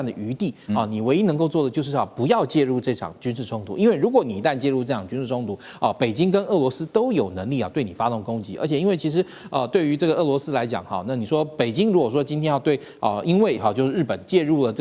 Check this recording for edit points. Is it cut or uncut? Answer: uncut